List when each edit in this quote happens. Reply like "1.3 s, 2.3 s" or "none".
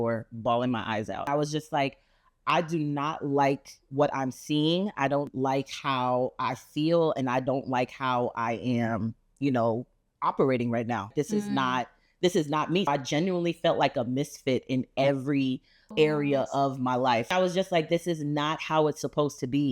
1.3 s, 11.1 s, 12.9 s, 15.9 s, 17.3 s